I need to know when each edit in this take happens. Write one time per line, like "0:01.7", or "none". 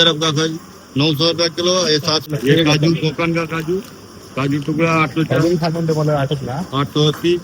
0:02.3